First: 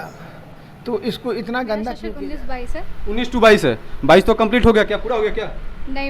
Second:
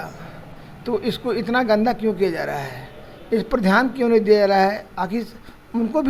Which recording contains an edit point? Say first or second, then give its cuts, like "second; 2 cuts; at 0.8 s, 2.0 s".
first; 1 cut; at 2.1 s